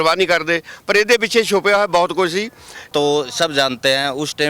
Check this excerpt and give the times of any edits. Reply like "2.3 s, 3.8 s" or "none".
2.9 s

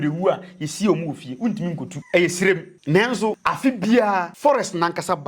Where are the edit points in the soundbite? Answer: 1.9 s, 2.7 s, 3.4 s, 4.3 s

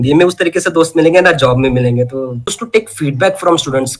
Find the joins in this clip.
2.5 s

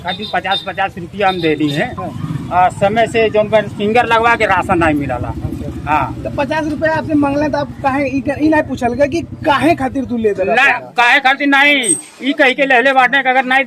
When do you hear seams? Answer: none

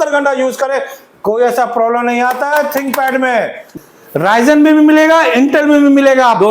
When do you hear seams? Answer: 3.7 s

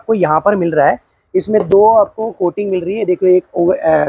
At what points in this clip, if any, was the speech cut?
none

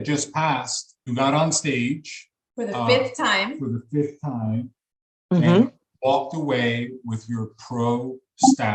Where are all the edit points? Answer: 1.1 s

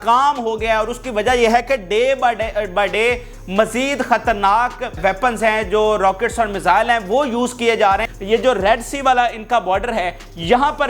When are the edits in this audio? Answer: 5.0 s, 8.1 s

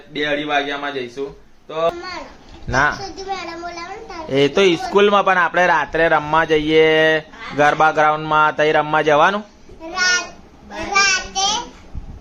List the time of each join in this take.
1.9 s

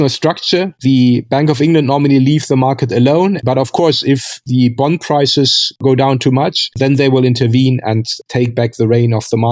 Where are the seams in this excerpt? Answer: 3.4 s

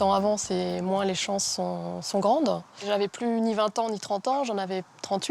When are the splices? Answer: 2.7 s

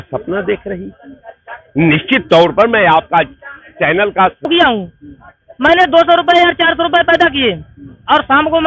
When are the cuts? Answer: 4.5 s

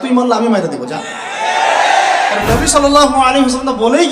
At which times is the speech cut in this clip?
2.4 s

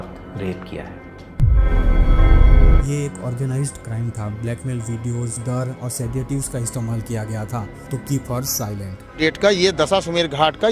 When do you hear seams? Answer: 2.8 s, 9.2 s

